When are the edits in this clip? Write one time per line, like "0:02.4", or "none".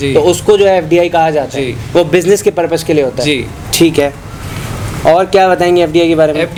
none